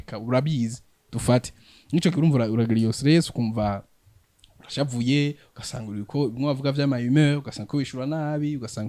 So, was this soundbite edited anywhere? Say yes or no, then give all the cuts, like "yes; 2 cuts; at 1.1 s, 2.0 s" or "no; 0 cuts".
no; 0 cuts